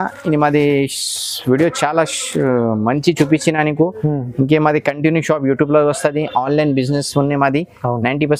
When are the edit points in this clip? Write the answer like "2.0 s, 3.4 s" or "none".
none